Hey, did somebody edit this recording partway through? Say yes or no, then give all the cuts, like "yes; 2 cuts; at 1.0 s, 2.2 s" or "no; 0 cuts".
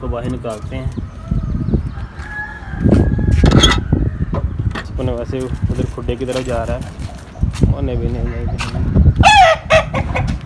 yes; 1 cut; at 4.9 s